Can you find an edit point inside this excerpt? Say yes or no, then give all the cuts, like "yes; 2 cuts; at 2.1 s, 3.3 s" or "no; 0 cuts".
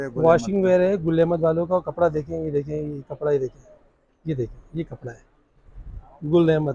no; 0 cuts